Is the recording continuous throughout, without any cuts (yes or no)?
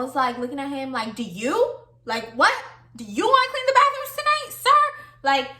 yes